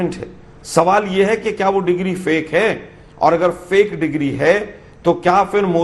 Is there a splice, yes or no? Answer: no